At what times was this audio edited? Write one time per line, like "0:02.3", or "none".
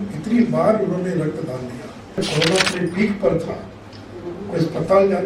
0:02.2